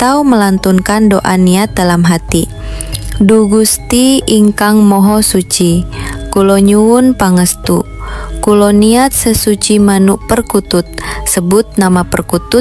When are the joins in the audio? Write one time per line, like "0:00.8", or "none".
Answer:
none